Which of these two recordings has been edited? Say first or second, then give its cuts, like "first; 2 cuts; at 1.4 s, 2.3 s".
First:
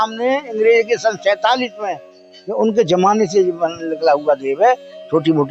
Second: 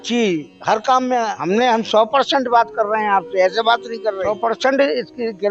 second; 2 cuts; at 1.4 s, 4.2 s